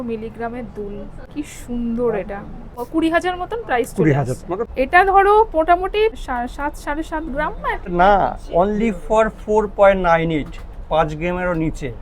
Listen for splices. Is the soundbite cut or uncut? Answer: cut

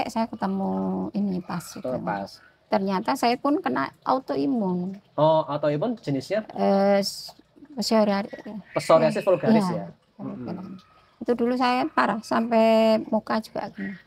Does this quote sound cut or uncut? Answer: cut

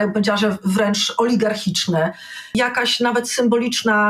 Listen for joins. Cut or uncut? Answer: cut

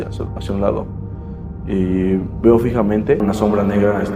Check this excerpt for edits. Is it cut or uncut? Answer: cut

